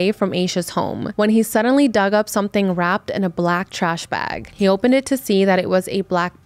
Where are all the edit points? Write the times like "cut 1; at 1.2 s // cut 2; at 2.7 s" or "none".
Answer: cut 1; at 1.0 s